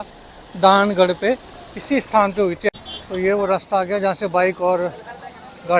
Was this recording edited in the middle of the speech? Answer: yes; 1 cut; at 2.7 s

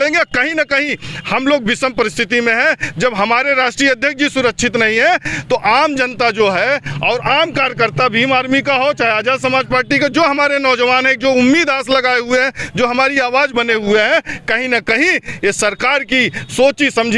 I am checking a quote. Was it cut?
no; 0 cuts

